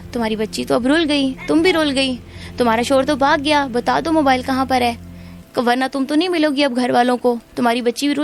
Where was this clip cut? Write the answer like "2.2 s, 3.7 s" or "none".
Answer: none